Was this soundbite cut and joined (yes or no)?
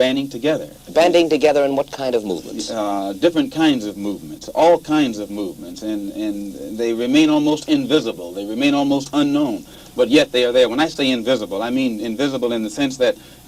yes